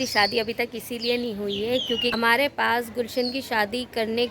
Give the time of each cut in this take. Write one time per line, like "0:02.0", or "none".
0:02.1